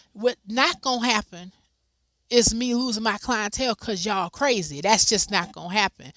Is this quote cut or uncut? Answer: uncut